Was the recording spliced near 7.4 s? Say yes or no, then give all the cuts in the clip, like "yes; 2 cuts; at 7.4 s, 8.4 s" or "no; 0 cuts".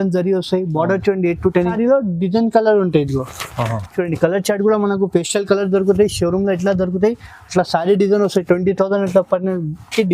no; 1 cut; at 1.8 s